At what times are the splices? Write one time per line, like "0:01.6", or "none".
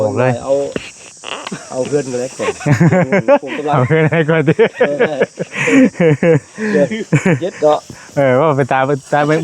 none